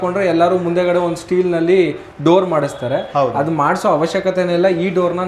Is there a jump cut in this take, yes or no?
no